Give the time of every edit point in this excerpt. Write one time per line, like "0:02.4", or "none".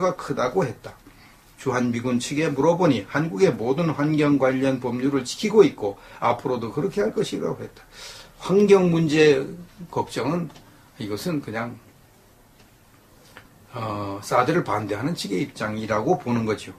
none

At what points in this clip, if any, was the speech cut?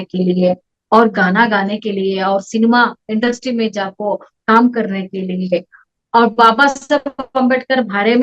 0:05.8

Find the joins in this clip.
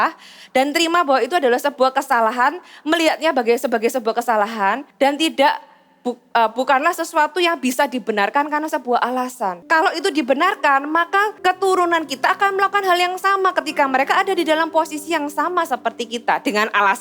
0:04.9
0:09.6
0:11.3

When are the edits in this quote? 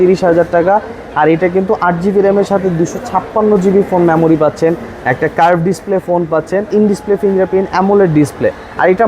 0:06.7

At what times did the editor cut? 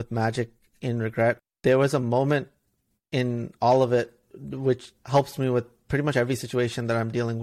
0:01.4
0:04.9
0:05.8

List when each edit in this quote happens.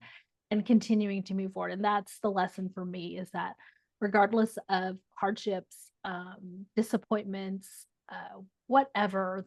none

